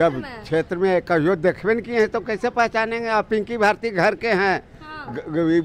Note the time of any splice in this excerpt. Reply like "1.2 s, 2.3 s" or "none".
none